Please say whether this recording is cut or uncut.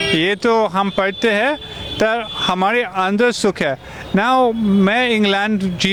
uncut